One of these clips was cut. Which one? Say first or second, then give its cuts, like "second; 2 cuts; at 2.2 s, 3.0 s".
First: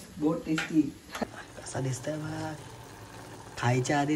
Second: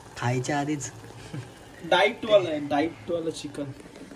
first; 1 cut; at 1.1 s